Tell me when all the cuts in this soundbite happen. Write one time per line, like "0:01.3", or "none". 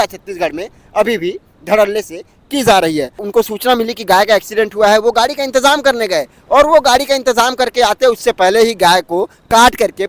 0:03.2

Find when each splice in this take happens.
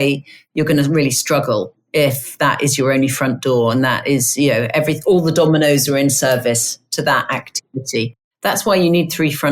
0:08.2

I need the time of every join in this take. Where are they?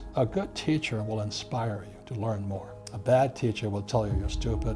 0:02.3

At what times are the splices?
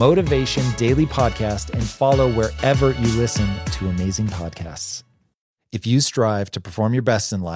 none

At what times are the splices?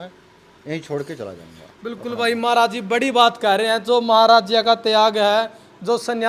none

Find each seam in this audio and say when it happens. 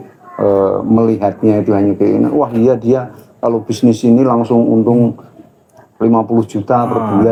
none

